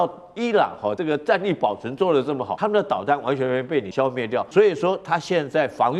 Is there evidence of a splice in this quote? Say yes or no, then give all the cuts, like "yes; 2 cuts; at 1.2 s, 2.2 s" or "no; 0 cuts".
yes; 3 cuts; at 1.0 s, 2.5 s, 4.0 s